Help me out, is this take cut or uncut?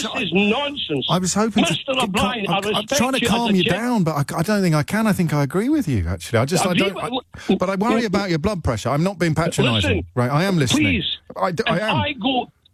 uncut